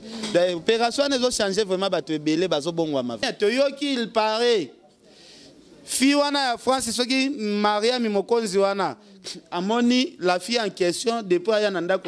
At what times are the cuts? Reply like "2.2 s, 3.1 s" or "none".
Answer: 3.2 s